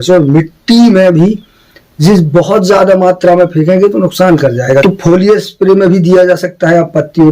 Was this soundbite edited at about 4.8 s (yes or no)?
yes